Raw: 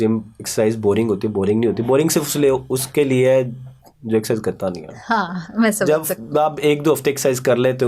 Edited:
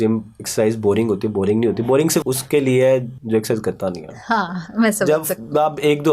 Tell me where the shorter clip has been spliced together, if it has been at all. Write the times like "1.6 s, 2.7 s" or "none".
2.3 s, 3.1 s